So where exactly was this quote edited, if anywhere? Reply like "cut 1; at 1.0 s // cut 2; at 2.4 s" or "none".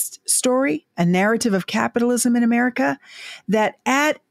none